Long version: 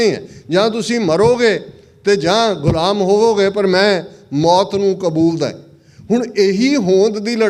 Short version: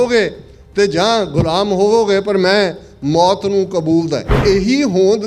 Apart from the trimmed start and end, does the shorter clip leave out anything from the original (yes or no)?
yes